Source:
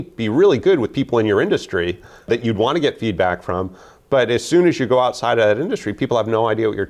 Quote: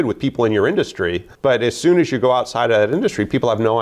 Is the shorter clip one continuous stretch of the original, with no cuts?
no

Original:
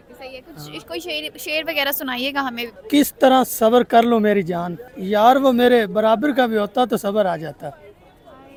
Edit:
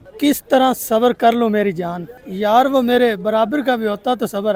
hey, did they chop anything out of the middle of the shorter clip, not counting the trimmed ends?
no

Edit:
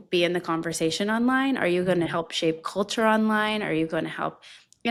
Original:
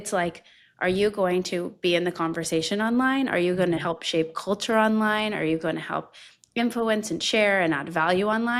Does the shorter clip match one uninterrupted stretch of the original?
yes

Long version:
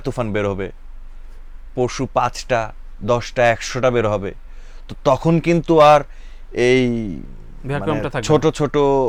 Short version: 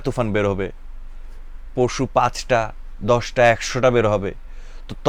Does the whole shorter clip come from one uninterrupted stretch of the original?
yes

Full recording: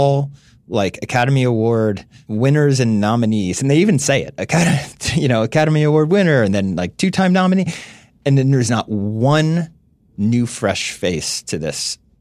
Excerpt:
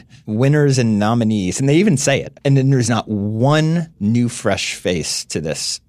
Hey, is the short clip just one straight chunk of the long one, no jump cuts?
no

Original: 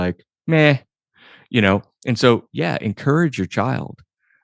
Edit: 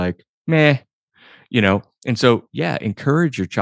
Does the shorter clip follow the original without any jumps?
yes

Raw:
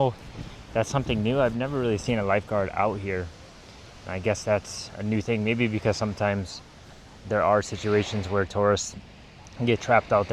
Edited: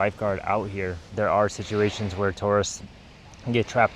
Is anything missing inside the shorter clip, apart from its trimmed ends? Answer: yes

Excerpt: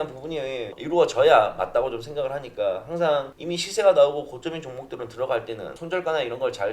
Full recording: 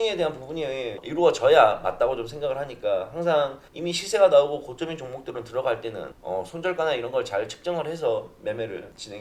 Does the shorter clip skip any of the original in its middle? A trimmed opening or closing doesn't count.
yes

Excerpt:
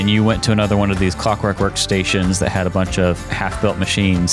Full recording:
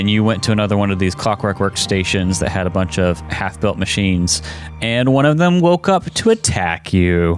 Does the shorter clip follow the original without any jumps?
yes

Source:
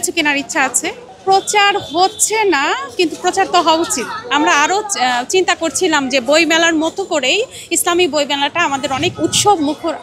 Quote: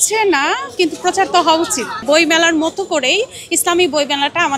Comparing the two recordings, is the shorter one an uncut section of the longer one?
no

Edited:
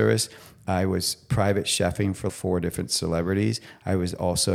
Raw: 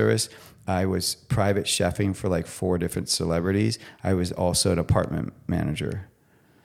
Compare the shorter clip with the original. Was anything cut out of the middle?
yes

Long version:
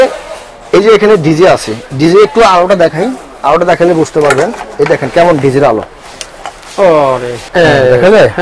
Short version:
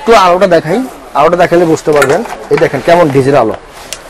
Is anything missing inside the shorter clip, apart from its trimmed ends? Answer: no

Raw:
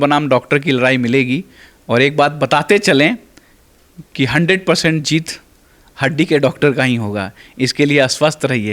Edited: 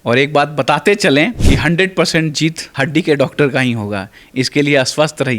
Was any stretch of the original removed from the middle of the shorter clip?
yes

